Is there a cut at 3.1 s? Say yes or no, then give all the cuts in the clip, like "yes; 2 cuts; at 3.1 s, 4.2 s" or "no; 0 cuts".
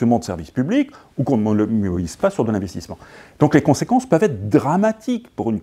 yes; 1 cut; at 3.1 s